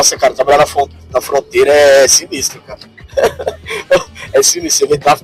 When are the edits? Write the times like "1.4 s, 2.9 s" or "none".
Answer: none